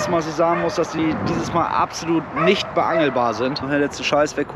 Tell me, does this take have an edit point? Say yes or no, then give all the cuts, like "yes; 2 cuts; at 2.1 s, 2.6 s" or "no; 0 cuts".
yes; 1 cut; at 3.6 s